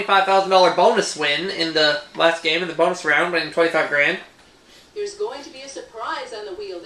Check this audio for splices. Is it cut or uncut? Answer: cut